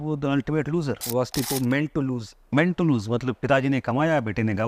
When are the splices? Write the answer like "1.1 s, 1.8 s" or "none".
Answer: 1.0 s